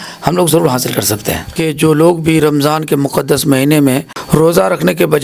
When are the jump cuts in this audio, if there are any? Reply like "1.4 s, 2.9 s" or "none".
1.6 s, 4.1 s

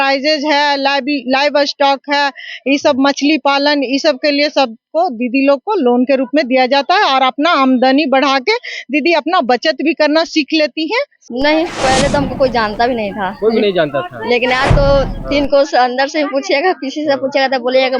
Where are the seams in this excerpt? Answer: 11.2 s

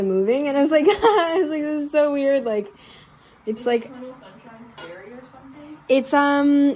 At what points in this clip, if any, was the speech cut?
none

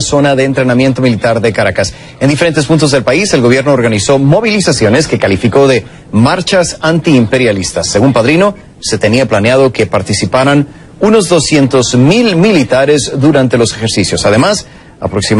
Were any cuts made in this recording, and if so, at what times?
13.3 s

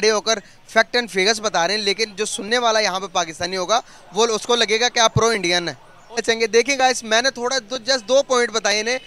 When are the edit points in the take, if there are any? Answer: 6.2 s

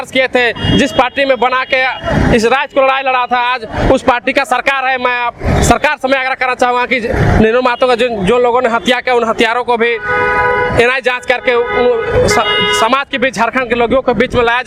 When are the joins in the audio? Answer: none

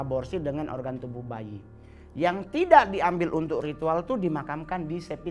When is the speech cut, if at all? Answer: none

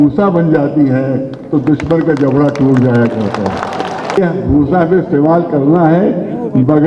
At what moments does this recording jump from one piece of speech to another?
4.2 s

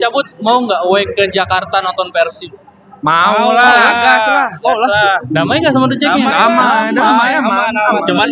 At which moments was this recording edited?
none

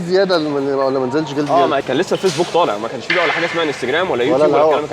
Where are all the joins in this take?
1.8 s

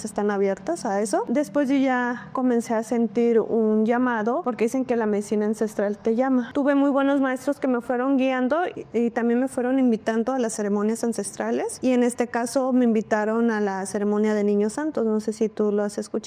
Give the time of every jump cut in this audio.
none

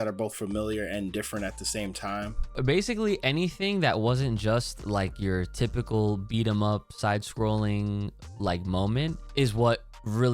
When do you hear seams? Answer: 2.6 s, 9.2 s

